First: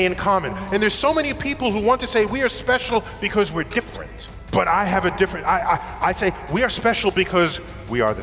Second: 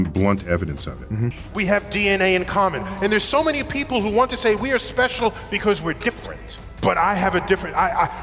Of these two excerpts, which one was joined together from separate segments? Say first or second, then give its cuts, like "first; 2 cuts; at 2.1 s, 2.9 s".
second; 1 cut; at 1.3 s